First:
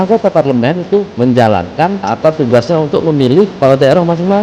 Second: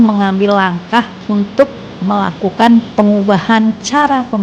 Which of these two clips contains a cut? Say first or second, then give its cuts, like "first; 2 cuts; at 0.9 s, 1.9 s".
first; 2 cuts; at 1.1 s, 2.0 s